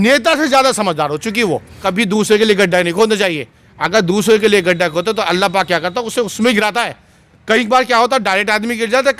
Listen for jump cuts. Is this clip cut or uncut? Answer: cut